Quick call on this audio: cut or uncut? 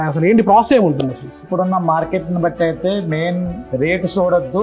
cut